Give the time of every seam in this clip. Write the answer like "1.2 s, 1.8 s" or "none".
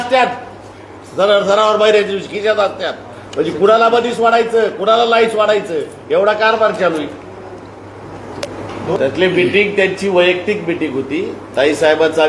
9.0 s